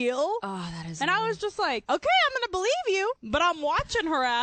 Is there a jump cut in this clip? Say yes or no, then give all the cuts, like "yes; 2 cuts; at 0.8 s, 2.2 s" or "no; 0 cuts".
yes; 2 cuts; at 1.8 s, 3.2 s